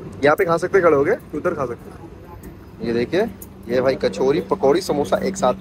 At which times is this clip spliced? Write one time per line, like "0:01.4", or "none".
none